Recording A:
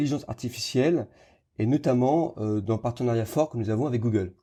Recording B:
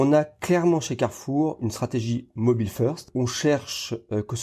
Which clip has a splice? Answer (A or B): B